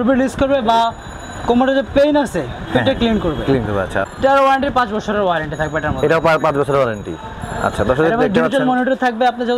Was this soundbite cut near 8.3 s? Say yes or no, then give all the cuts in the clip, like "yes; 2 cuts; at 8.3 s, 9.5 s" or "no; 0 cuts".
no; 1 cut; at 4.0 s